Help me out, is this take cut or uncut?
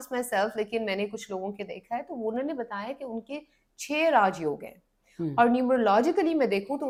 uncut